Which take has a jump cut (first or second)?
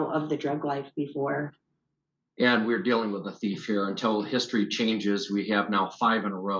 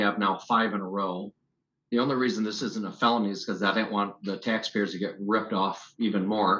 first